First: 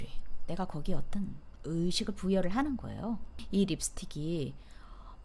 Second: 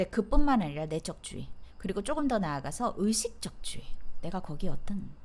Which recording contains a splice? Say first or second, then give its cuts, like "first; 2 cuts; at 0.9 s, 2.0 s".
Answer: first; 1 cut; at 3.4 s